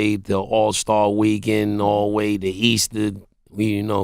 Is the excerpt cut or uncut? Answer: uncut